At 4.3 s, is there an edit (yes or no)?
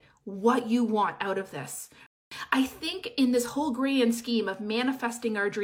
no